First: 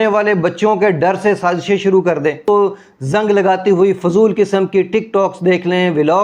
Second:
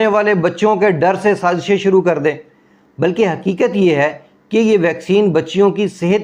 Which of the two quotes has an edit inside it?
first; 1 cut; at 2.4 s

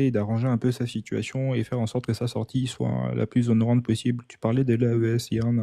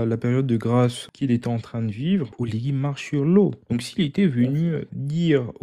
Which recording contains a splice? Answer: second; 3 cuts; at 1.0 s, 2.3 s, 3.6 s

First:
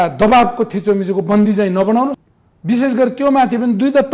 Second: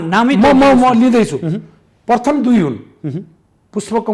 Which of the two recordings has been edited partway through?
first; 1 cut; at 2.2 s

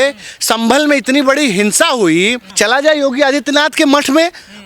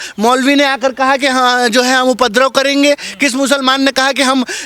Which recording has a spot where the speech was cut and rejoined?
first; 1 cut; at 2.4 s

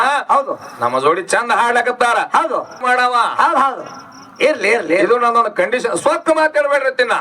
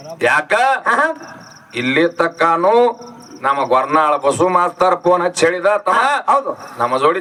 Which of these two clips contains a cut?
first; 1 cut; at 2.8 s

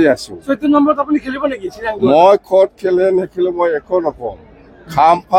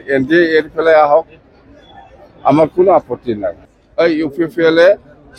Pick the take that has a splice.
second; 1 cut; at 3.7 s

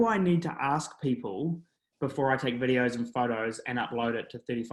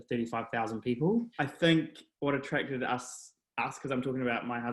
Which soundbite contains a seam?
second; 1 cut; at 1.4 s

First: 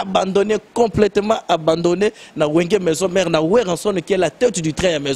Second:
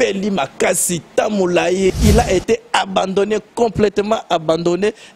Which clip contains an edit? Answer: second; 1 cut; at 1.9 s

